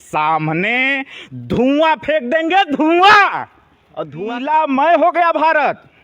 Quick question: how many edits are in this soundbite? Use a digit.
1